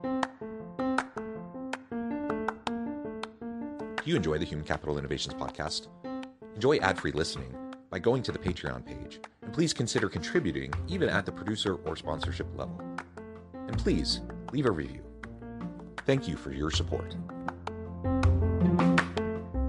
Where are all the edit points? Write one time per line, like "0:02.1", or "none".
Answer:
none